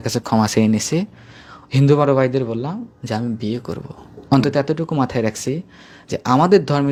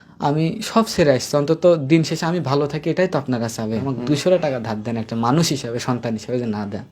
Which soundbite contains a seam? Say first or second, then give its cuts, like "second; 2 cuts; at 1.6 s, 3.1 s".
second; 1 cut; at 3.9 s